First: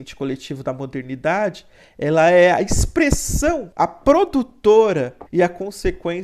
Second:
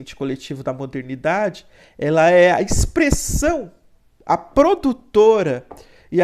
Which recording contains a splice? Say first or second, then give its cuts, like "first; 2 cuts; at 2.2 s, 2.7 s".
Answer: first; 2 cuts; at 3.7 s, 5.2 s